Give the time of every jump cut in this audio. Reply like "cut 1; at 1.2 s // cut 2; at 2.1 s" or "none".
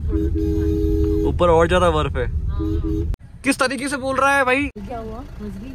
cut 1; at 3.2 s // cut 2; at 4.8 s